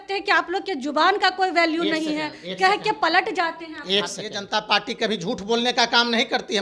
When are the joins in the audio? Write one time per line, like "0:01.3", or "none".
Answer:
0:04.4